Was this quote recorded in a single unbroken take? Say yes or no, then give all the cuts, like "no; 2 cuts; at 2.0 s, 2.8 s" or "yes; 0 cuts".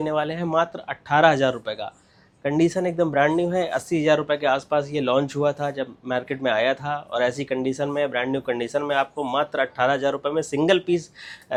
yes; 0 cuts